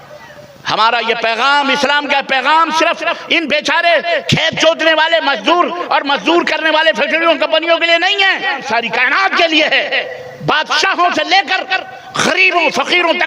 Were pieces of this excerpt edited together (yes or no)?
yes